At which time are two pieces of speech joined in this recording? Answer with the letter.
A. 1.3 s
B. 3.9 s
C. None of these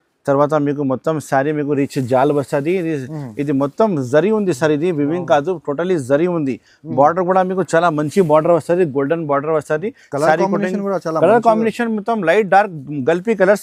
C